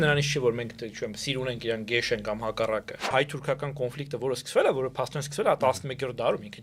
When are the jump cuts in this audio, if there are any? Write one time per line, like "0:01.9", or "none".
0:03.1